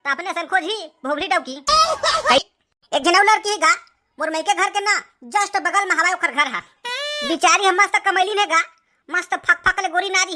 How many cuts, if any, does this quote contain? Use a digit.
1